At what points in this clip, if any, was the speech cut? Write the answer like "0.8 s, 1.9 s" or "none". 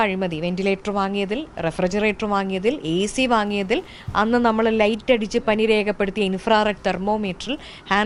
none